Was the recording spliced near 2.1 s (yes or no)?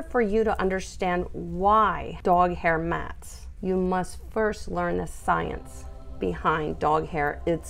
yes